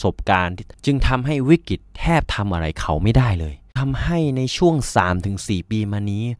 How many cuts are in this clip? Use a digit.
1